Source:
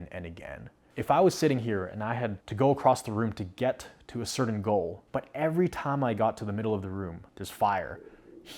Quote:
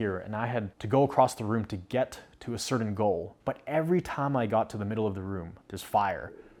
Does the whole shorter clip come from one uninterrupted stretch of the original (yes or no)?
yes